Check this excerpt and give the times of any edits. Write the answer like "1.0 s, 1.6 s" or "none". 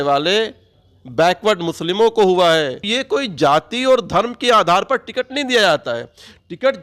2.9 s